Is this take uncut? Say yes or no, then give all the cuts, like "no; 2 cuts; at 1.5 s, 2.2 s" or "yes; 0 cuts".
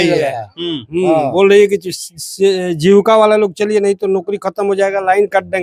yes; 0 cuts